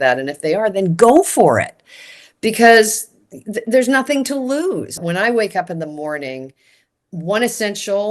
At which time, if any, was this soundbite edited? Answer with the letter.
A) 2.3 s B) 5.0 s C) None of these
B